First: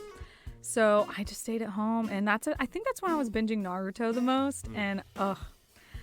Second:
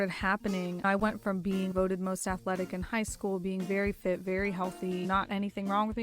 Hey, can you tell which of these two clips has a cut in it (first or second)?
second